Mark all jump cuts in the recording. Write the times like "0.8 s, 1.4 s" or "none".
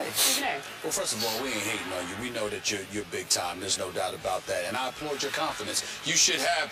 none